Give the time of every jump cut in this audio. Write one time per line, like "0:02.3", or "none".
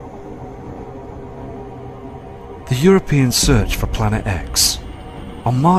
0:02.2